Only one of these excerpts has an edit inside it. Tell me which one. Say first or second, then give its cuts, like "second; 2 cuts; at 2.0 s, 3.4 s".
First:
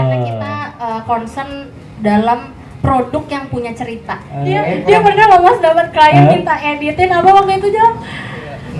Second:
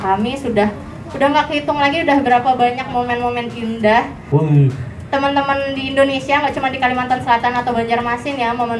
first; 1 cut; at 4.5 s